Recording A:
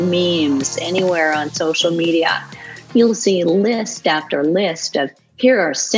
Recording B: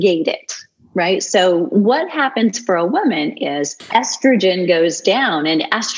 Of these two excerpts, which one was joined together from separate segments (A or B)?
B